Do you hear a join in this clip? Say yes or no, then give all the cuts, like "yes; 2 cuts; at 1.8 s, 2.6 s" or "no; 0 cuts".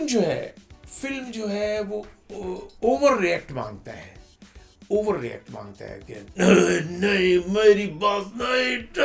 no; 0 cuts